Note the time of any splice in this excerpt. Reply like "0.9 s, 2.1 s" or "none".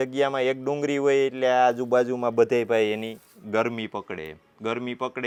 none